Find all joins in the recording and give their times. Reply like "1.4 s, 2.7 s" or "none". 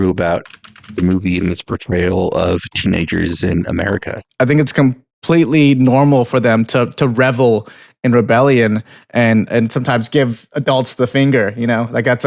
4.2 s